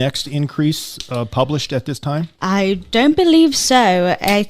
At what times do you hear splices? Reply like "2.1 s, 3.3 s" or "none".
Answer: 2.3 s